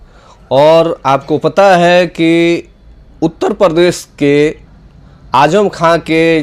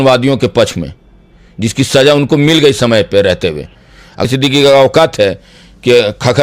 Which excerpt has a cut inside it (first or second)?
second